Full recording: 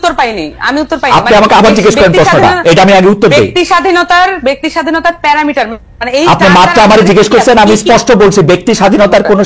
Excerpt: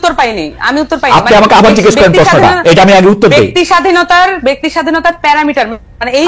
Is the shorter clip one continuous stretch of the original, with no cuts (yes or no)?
yes